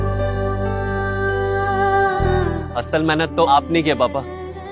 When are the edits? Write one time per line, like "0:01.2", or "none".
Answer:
0:02.4